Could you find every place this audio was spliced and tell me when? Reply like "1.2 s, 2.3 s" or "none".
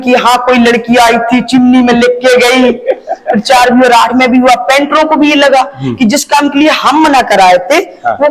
none